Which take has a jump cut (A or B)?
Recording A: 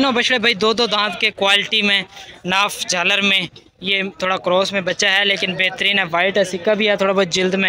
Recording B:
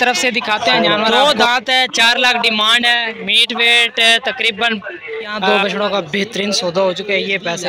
B